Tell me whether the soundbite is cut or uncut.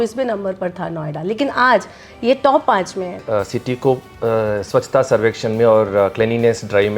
cut